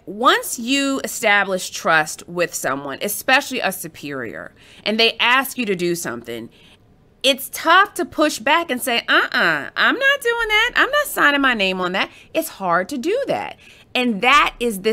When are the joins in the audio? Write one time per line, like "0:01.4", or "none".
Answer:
none